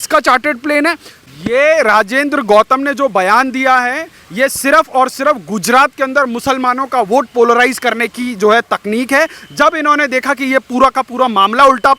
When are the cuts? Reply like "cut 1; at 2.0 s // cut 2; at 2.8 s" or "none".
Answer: cut 1; at 1.1 s